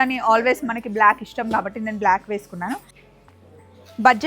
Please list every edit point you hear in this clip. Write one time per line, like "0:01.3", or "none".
0:02.9

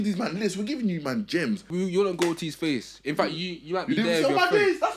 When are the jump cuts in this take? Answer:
0:01.7

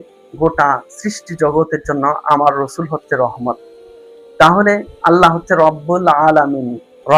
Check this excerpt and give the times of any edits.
none

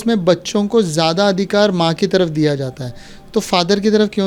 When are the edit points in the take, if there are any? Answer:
none

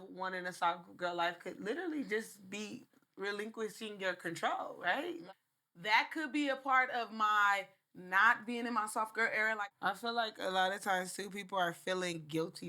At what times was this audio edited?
0:05.2
0:09.6

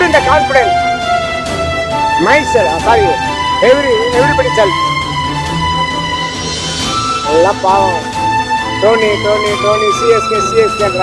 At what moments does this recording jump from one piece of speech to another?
none

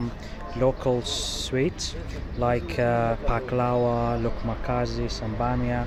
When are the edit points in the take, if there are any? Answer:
none

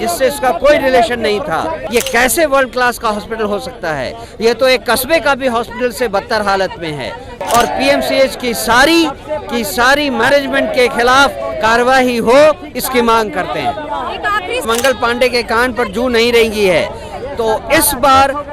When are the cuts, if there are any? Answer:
0:01.8
0:07.4
0:14.6

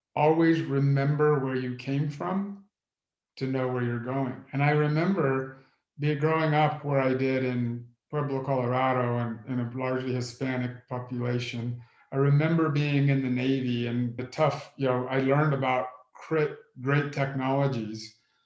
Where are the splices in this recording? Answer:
0:14.2

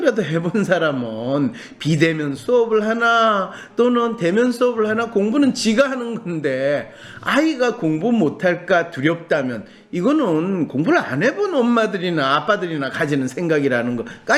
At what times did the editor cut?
none

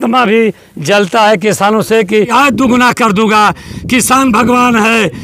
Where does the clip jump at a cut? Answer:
0:02.3

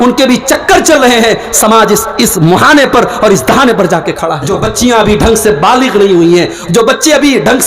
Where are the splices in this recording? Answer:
0:04.3

